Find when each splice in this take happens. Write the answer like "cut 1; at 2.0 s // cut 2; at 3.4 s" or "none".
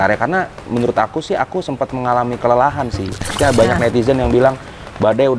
cut 1; at 3.3 s